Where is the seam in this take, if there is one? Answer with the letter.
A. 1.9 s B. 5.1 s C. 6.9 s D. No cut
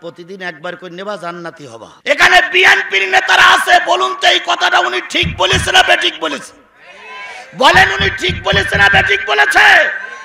A